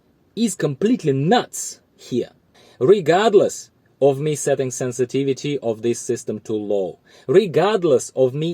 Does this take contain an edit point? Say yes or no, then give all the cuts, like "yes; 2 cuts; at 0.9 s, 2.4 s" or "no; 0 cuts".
yes; 1 cut; at 2.5 s